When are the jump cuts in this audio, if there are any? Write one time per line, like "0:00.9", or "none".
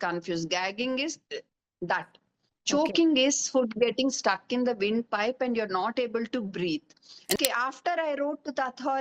0:07.4